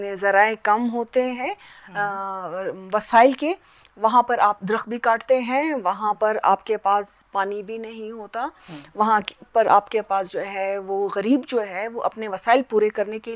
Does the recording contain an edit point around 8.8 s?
no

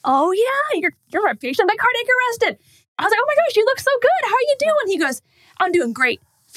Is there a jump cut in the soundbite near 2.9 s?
yes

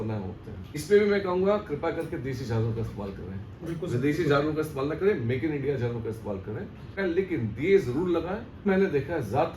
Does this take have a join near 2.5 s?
no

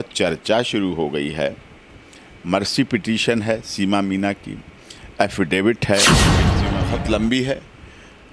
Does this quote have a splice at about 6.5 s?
yes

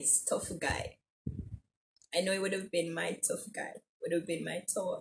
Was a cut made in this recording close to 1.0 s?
no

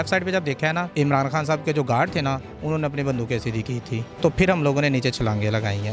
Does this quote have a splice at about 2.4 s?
no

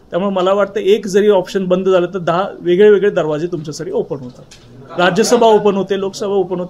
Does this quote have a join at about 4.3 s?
no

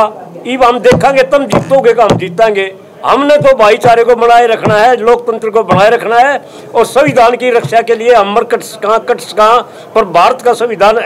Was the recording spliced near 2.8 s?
no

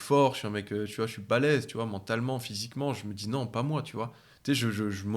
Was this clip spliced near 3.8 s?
no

